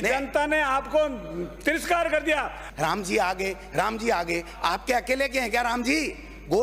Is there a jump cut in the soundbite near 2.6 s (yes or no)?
yes